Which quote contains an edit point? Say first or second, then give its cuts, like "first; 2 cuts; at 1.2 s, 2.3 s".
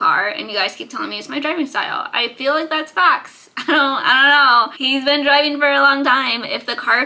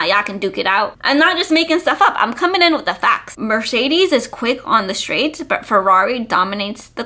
second; 2 cuts; at 1.0 s, 3.3 s